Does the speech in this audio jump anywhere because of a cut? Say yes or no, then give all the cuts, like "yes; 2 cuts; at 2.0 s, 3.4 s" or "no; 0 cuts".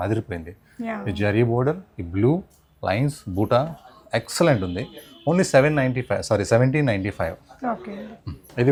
no; 0 cuts